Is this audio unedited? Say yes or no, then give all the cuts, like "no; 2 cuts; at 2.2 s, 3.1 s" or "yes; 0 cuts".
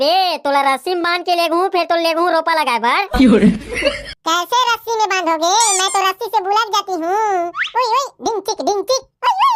yes; 0 cuts